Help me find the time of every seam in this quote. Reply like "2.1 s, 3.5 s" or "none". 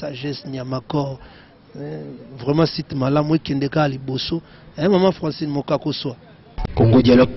6.5 s